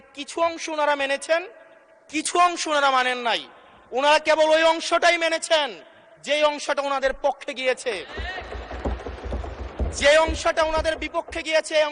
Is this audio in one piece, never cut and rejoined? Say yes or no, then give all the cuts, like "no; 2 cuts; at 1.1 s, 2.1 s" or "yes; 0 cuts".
yes; 0 cuts